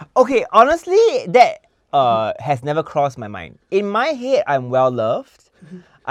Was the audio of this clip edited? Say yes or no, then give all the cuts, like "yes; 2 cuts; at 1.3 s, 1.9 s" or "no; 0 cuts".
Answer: no; 0 cuts